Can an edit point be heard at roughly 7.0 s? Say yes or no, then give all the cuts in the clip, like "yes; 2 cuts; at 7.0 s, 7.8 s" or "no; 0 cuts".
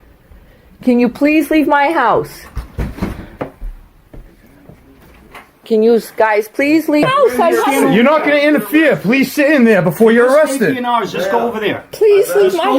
yes; 1 cut; at 7.0 s